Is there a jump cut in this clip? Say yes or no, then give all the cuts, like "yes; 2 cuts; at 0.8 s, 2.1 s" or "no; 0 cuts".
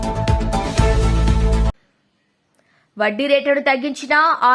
yes; 1 cut; at 1.8 s